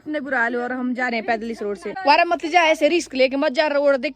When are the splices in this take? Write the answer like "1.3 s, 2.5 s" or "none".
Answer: 1.9 s